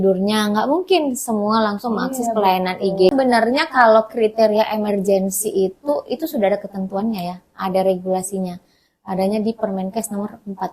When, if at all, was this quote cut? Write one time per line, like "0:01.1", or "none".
0:03.1